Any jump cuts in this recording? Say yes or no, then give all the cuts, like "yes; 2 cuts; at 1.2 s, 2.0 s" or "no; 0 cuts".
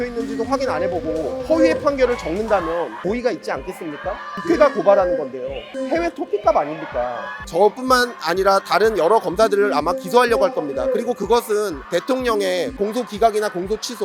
yes; 5 cuts; at 3.0 s, 4.3 s, 7.4 s, 11.8 s, 12.7 s